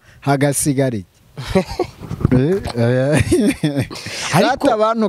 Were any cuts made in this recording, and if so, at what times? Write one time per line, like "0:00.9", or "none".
none